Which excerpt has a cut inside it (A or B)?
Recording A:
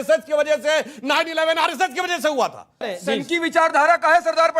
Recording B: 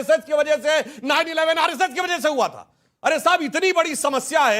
A